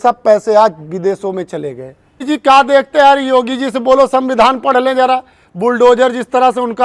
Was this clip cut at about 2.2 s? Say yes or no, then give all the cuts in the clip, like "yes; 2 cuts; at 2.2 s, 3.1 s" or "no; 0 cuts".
yes; 1 cut; at 2.2 s